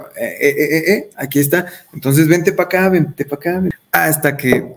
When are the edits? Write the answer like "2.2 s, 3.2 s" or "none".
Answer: 3.8 s